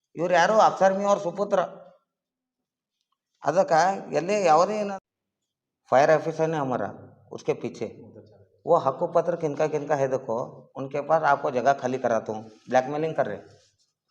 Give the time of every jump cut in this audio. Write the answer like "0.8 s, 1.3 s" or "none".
5.0 s

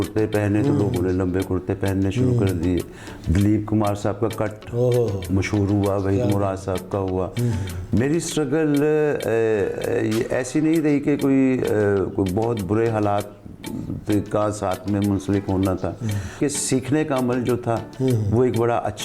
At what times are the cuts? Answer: 7.7 s, 16.4 s

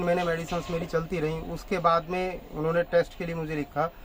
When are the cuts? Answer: none

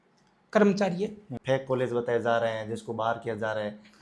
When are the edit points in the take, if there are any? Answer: 1.3 s

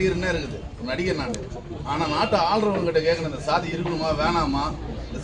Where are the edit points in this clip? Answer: none

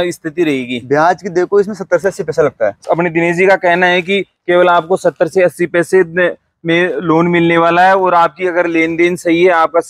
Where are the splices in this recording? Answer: 2.8 s

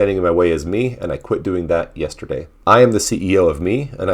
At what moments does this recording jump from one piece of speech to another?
2.5 s

